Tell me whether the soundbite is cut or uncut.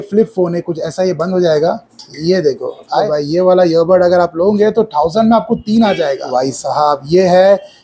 cut